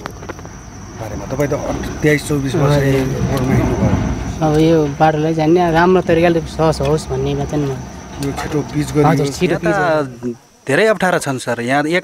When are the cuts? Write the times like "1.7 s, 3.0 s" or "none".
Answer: 9.7 s